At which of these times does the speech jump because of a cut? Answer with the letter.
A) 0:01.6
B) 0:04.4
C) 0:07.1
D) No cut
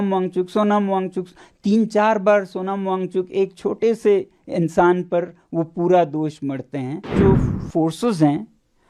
C